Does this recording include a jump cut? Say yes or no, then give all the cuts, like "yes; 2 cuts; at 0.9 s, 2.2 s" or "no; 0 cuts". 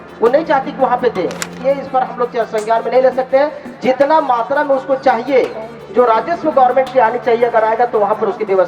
yes; 1 cut; at 1.6 s